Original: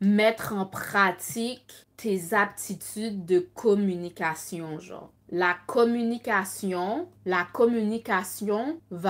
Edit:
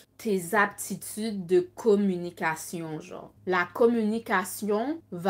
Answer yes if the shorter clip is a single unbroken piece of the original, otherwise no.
no